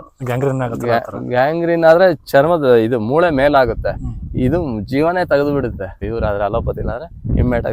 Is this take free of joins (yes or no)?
no